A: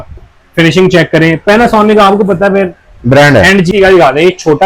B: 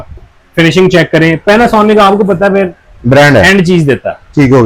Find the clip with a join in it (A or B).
A